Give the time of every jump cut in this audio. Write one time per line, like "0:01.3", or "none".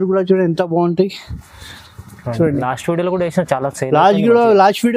none